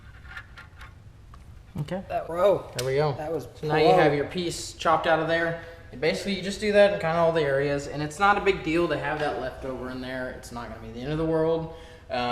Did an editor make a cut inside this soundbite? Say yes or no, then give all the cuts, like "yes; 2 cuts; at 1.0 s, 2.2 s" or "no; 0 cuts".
yes; 1 cut; at 2.3 s